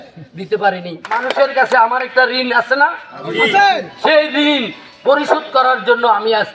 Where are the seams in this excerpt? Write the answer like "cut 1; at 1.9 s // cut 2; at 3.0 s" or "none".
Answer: cut 1; at 1.1 s

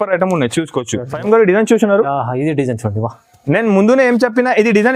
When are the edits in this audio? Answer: cut 1; at 1.1 s

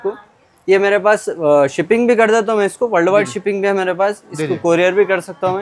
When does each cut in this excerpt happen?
none

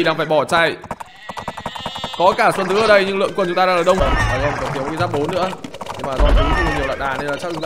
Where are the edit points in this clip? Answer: cut 1; at 4.0 s

